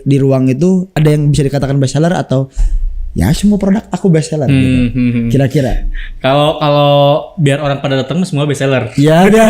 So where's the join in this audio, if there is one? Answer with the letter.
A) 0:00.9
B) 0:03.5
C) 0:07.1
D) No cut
A